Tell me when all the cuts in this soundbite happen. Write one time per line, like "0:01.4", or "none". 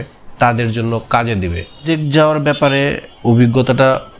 0:01.8